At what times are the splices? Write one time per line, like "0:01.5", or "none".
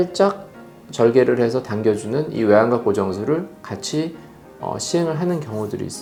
none